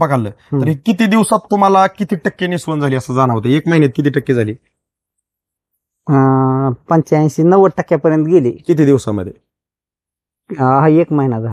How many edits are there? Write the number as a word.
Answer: zero